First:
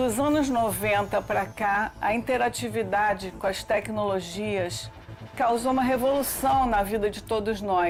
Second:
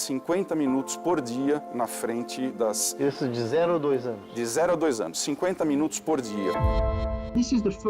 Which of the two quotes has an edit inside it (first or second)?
second